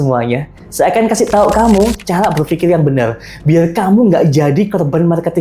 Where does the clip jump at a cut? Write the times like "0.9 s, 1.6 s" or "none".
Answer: none